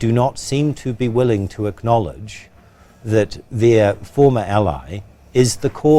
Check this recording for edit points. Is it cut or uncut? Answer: uncut